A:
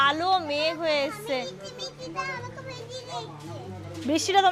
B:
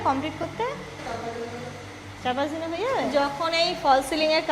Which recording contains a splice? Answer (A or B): B